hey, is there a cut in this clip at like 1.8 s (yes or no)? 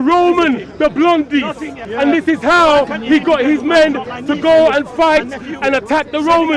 yes